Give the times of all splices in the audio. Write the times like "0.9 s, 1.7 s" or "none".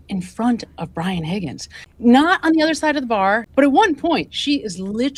none